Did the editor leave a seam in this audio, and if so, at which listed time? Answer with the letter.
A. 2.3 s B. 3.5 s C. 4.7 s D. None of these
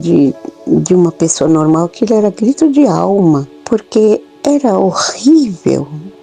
B